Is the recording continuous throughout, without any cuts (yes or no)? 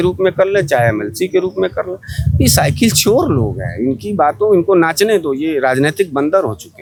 yes